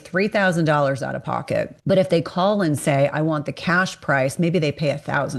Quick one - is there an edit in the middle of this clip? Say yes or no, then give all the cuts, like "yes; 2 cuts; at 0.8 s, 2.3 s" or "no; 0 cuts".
yes; 1 cut; at 1.7 s